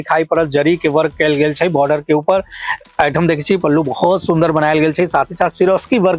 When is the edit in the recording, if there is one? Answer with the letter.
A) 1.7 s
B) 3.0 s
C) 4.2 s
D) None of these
D